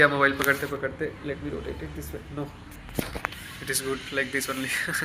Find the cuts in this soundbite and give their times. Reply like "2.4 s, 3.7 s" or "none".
none